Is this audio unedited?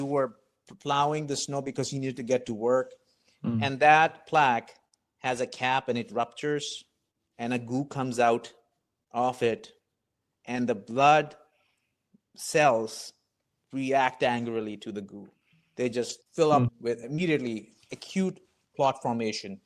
yes; 0 cuts

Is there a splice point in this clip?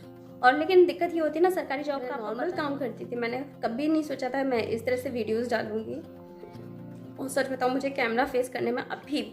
yes; 1 cut; at 2.2 s

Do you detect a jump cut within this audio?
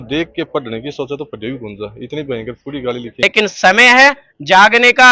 yes; 1 cut; at 3.2 s

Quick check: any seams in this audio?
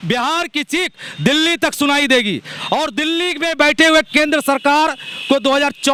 no; 0 cuts

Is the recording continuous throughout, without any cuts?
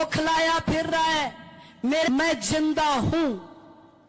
no; 1 cut; at 2.1 s

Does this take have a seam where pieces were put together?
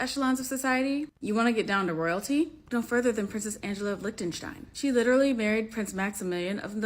no; 0 cuts

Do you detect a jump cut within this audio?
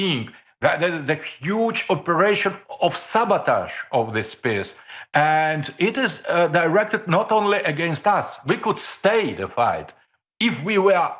no; 0 cuts

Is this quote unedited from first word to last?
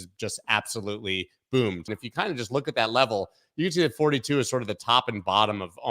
no; 1 cut; at 2.0 s

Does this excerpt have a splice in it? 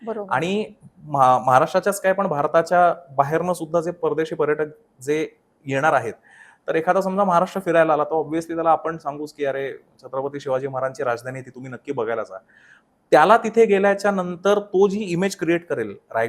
no; 0 cuts

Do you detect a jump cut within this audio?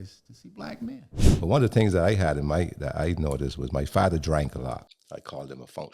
yes; 2 cuts; at 1.2 s, 4.9 s

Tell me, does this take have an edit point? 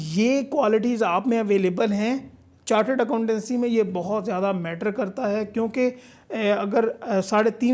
no; 0 cuts

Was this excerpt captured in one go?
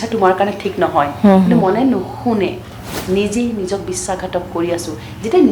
no; 1 cut; at 2.6 s

